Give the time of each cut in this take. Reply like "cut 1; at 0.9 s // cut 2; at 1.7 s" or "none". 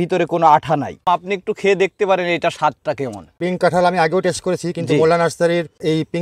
cut 1; at 1.0 s // cut 2; at 3.3 s